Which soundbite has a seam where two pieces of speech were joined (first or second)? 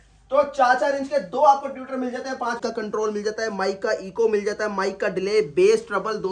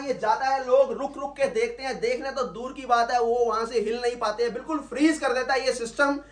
first